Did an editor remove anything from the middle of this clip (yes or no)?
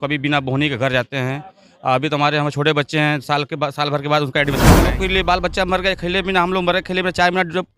yes